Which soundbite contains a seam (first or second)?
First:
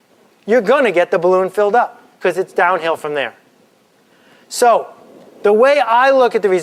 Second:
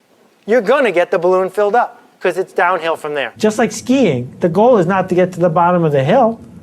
second